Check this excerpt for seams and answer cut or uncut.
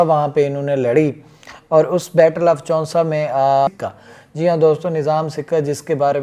cut